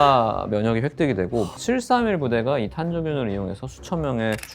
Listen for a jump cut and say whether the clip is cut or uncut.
cut